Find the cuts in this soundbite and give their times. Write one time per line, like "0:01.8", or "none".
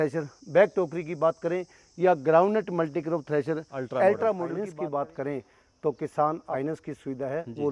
0:04.5
0:06.5